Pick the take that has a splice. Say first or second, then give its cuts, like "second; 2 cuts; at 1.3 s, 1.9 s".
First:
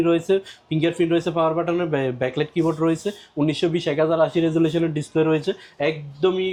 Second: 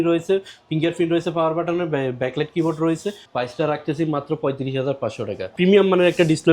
second; 2 cuts; at 3.2 s, 5.5 s